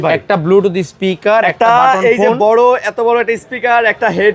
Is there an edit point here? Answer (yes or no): no